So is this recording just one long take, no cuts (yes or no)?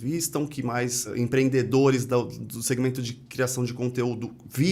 no